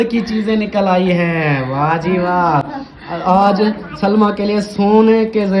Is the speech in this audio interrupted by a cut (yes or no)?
no